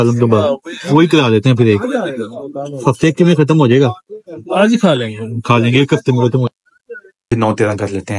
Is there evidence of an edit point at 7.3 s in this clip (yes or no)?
yes